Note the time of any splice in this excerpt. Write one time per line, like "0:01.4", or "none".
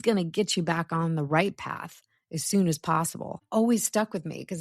0:03.4